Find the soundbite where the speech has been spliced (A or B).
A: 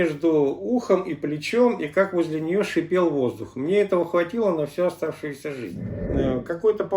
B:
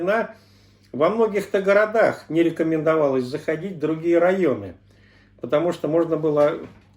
A